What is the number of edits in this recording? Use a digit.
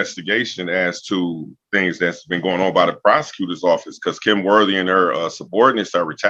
0